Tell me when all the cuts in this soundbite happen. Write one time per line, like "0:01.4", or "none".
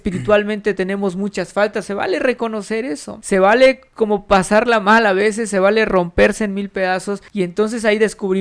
0:03.1
0:07.2